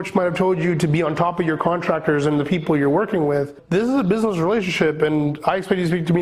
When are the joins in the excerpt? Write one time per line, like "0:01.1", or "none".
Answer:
0:03.6